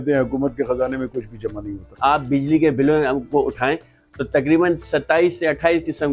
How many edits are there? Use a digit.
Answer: 1